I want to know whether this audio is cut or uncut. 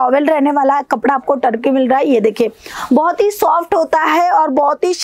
uncut